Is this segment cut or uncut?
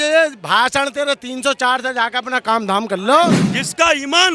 cut